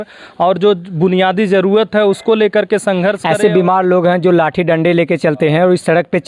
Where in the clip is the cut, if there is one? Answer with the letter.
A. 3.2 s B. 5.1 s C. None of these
A